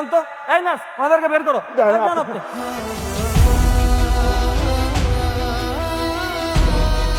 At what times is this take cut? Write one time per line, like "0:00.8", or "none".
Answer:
none